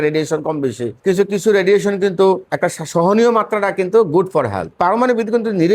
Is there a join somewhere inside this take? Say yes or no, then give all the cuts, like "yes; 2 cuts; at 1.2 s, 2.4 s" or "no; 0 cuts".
yes; 3 cuts; at 0.9 s, 2.5 s, 4.7 s